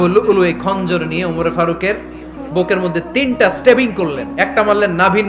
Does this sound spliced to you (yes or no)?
no